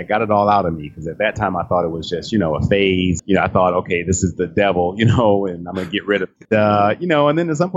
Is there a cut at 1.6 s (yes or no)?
no